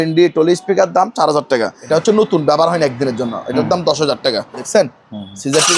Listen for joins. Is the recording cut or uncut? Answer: cut